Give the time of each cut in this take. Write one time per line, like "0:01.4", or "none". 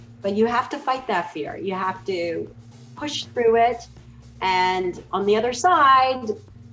none